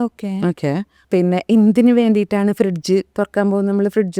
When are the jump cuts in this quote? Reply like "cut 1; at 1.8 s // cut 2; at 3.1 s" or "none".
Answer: cut 1; at 0.9 s